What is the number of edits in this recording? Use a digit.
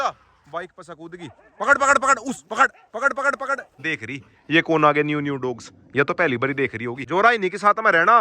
2